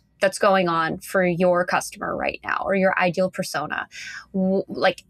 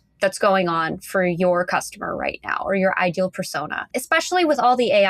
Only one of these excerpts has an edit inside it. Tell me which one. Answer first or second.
second